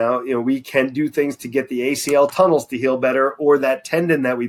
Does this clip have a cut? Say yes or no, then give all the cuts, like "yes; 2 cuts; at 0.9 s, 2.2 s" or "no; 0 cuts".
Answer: no; 0 cuts